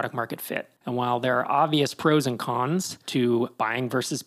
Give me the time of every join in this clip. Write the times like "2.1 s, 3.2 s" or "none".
3.0 s, 3.5 s